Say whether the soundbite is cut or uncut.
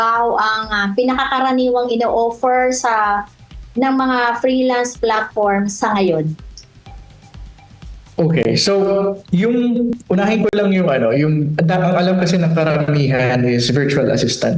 uncut